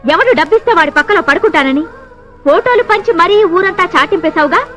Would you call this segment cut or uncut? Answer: uncut